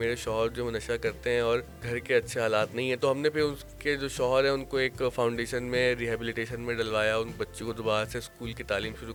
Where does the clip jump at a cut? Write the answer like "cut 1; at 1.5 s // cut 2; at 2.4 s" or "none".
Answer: none